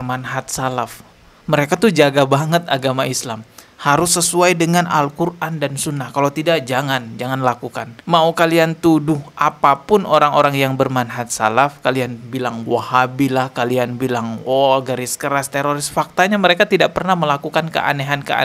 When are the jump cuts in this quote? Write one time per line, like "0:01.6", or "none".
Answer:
none